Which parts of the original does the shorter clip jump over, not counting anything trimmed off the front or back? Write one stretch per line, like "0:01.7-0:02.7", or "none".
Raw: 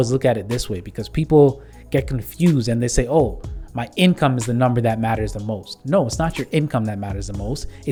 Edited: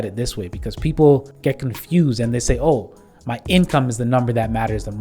0:01.6-0:01.8